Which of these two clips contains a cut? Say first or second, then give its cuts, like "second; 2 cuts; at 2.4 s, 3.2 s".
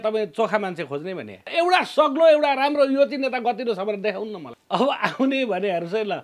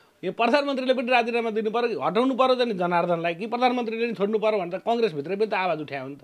first; 2 cuts; at 1.5 s, 4.5 s